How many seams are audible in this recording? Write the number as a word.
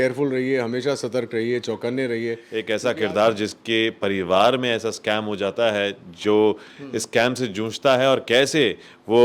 one